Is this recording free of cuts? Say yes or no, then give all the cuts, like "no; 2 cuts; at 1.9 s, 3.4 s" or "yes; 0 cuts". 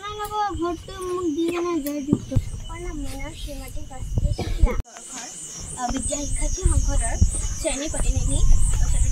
no; 2 cuts; at 2.3 s, 5.0 s